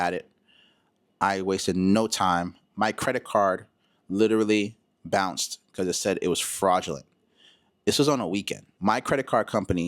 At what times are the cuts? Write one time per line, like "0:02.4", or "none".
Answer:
0:08.6